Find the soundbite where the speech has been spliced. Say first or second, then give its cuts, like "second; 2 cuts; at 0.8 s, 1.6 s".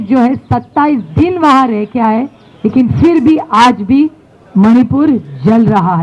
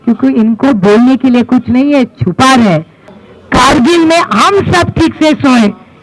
second; 1 cut; at 3.0 s